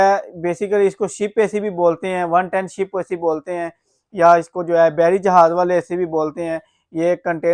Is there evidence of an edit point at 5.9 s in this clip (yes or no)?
no